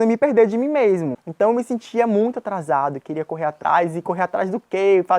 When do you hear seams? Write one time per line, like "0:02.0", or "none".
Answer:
0:01.1